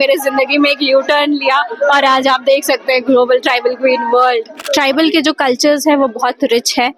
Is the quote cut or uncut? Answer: cut